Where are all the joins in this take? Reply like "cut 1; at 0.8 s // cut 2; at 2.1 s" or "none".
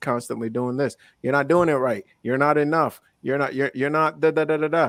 none